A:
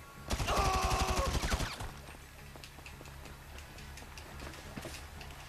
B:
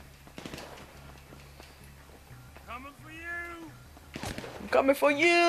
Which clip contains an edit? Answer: B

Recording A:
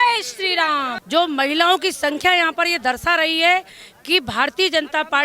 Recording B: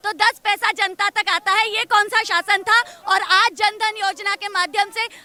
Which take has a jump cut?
A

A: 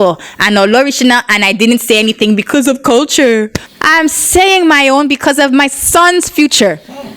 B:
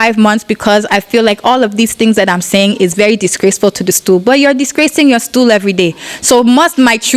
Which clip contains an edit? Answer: A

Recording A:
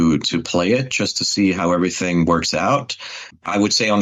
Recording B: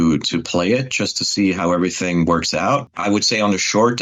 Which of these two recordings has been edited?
B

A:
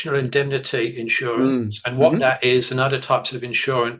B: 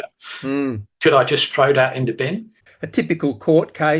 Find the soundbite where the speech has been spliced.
B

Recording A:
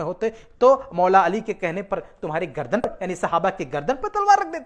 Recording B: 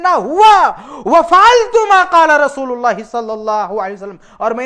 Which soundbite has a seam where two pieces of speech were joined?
A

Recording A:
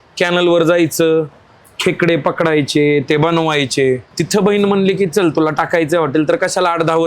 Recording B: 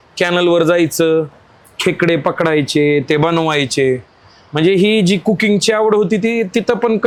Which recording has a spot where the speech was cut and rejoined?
A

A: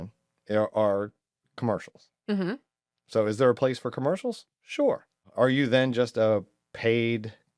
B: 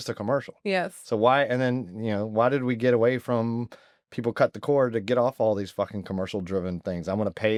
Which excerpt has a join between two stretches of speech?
A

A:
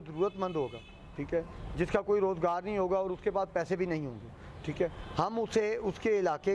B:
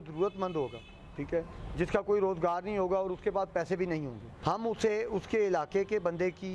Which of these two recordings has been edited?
B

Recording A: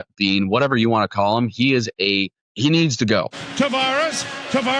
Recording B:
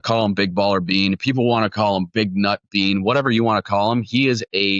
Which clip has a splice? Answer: A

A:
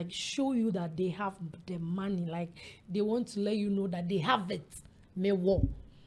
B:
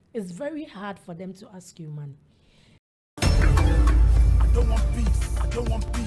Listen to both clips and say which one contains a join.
B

